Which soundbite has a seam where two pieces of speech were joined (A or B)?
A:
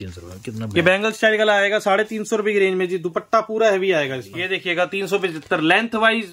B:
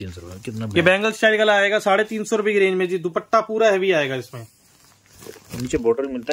A